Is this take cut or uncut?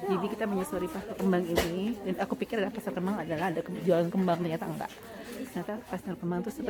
uncut